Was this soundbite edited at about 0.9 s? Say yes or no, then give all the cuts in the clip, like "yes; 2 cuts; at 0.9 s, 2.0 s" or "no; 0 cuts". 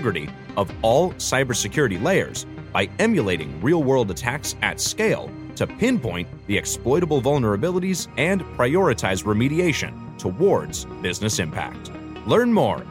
no; 0 cuts